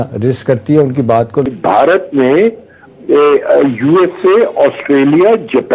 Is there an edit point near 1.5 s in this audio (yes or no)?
yes